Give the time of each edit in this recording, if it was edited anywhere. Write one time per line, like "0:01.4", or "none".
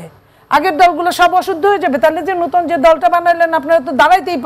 none